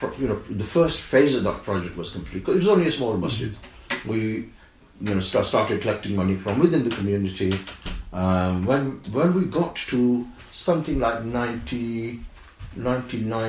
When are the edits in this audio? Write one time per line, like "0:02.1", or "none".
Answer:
none